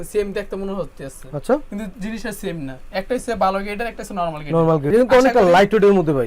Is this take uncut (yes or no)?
no